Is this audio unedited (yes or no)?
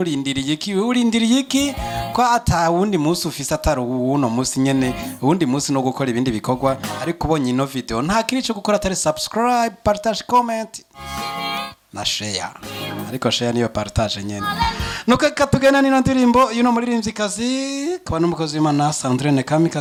yes